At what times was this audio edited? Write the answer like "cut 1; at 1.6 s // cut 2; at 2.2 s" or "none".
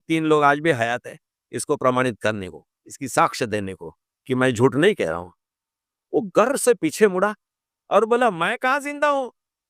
none